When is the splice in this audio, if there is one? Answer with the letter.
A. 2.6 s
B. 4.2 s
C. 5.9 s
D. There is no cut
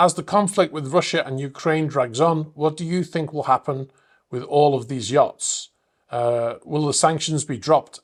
D